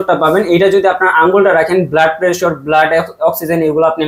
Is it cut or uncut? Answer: uncut